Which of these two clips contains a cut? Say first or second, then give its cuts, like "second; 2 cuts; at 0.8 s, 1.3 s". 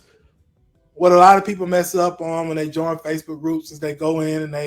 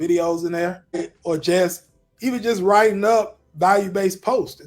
second; 1 cut; at 1.1 s